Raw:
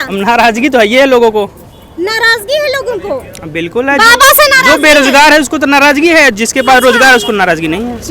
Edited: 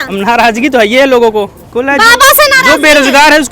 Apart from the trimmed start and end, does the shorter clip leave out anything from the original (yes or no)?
yes